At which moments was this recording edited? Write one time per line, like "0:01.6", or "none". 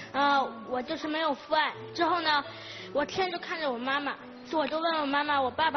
none